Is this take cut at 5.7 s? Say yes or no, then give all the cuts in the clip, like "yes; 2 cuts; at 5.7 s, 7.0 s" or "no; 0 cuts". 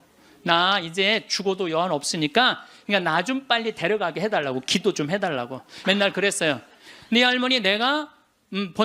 yes; 2 cuts; at 2.7 s, 5.7 s